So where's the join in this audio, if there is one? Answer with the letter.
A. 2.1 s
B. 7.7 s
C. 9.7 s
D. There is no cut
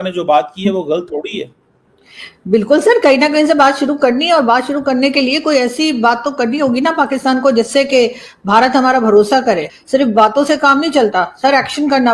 C